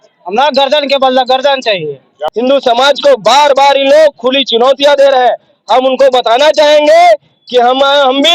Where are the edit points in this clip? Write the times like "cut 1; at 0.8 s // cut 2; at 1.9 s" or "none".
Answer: cut 1; at 2.2 s